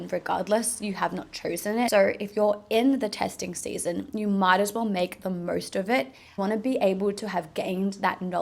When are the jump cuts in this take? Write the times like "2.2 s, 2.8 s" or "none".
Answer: 1.9 s, 6.4 s